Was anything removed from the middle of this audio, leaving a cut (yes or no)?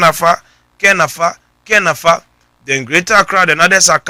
no